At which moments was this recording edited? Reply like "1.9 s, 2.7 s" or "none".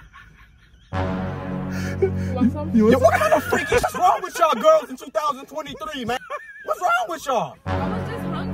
3.9 s, 6.2 s